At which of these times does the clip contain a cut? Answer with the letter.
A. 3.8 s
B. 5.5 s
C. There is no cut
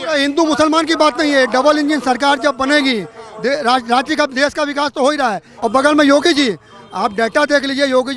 B